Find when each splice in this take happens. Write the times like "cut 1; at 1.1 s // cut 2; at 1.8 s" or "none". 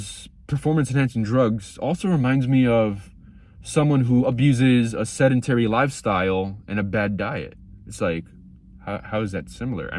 none